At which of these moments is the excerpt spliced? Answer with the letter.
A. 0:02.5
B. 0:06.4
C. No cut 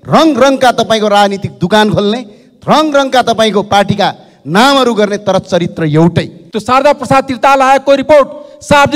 B